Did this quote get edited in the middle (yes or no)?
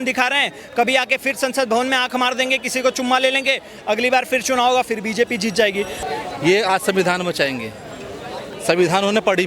yes